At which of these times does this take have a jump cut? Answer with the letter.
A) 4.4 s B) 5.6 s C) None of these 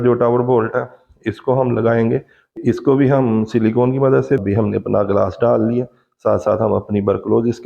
A